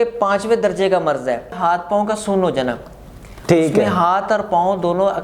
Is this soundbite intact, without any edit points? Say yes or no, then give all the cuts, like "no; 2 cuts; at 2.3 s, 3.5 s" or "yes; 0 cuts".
no; 1 cut; at 1.5 s